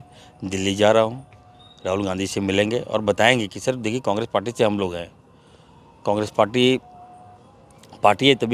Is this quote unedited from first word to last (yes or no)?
yes